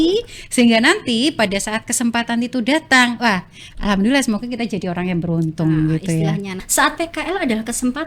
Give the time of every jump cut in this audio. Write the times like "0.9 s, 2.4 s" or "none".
6.7 s